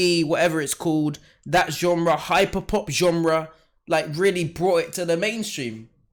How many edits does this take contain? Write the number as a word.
zero